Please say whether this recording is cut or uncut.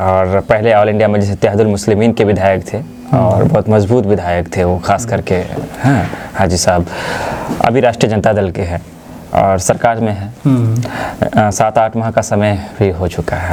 uncut